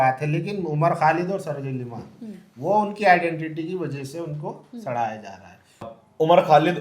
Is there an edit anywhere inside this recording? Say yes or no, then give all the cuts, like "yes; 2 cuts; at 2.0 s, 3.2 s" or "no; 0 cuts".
yes; 1 cut; at 5.9 s